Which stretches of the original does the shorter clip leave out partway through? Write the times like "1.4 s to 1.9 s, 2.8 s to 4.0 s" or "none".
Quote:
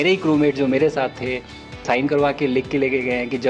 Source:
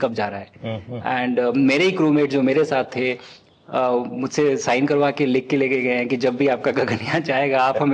3.6 s to 4.6 s